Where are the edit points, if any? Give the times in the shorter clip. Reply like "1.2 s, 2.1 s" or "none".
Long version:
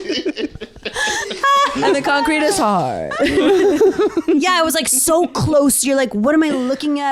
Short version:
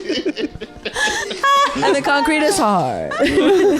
none